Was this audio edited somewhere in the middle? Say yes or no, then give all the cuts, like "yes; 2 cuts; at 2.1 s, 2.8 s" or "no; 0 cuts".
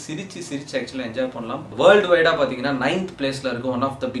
yes; 1 cut; at 1.7 s